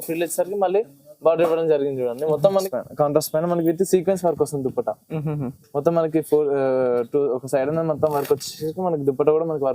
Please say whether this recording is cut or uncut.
cut